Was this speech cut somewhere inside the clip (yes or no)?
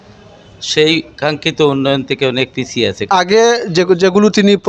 yes